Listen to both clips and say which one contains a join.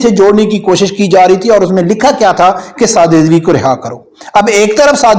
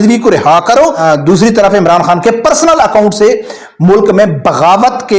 second; 1 cut; at 1.0 s

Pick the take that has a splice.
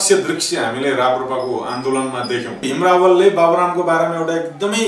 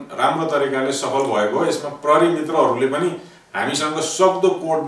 first; 1 cut; at 2.6 s

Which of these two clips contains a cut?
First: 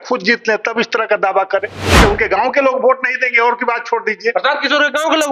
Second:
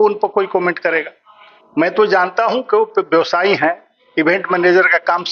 first; 1 cut; at 1.9 s

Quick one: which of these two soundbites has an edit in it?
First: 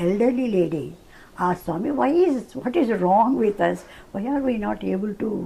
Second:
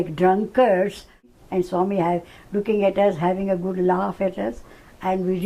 second; 1 cut; at 1.2 s

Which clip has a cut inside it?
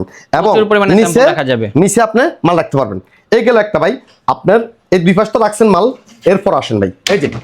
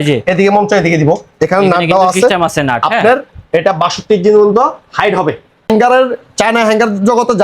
second; 1 cut; at 5.7 s

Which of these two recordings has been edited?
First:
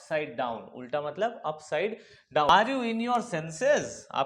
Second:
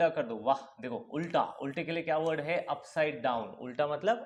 first; 1 cut; at 2.5 s

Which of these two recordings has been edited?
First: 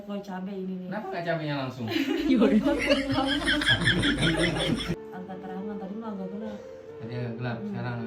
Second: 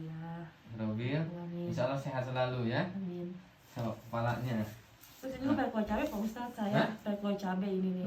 first; 1 cut; at 5.0 s

